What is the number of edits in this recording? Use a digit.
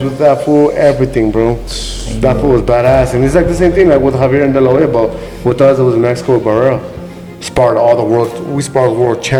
0